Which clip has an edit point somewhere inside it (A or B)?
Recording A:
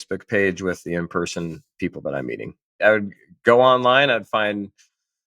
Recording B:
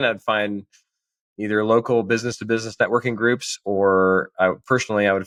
A